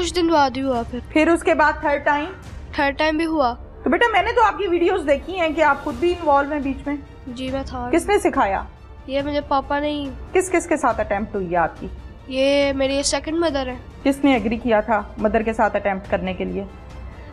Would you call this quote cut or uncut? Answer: cut